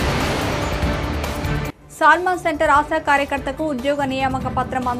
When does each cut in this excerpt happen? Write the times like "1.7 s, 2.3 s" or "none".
none